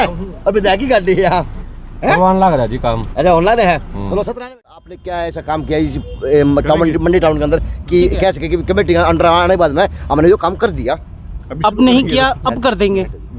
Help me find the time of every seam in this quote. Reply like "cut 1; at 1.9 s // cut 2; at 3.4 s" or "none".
cut 1; at 4.5 s

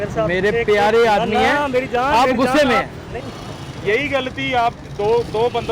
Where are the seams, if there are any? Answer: cut 1; at 3.1 s

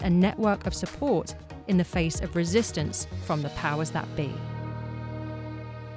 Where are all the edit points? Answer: cut 1; at 4.4 s

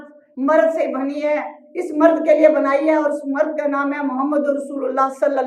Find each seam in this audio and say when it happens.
none

